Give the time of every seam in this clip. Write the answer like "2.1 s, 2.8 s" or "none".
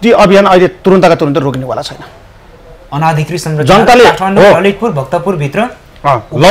none